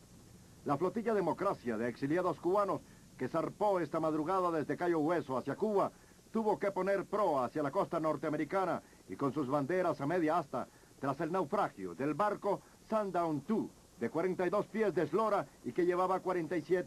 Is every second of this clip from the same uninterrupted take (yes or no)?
yes